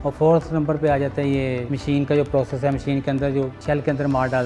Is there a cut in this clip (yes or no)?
no